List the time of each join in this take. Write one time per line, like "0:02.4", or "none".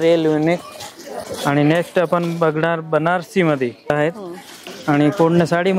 0:03.9